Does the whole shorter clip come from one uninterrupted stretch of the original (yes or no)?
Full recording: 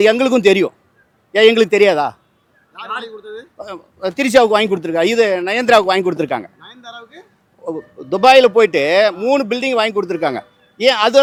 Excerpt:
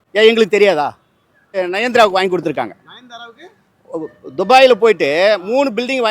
no